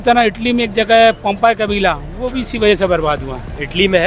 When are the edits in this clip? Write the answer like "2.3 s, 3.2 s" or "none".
none